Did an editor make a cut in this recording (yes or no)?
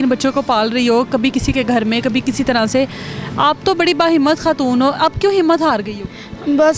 no